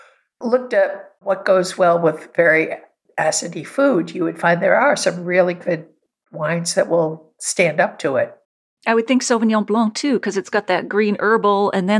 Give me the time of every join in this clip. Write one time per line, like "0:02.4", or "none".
none